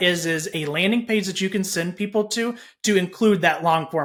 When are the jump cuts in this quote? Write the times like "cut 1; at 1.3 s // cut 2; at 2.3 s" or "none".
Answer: none